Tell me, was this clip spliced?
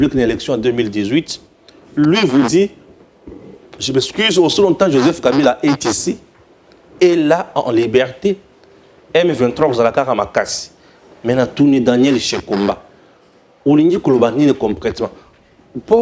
no; 0 cuts

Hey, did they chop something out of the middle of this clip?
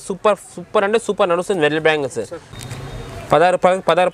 yes; 1 cut; at 2.2 s

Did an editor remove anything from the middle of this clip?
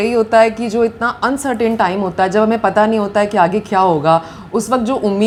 no; 0 cuts

